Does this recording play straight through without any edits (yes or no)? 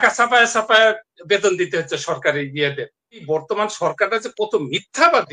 no